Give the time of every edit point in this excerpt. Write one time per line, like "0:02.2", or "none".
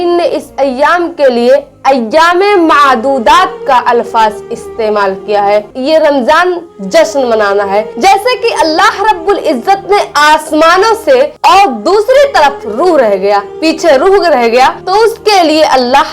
0:05.7
0:11.3